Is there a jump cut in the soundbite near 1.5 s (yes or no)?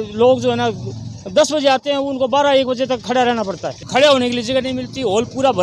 no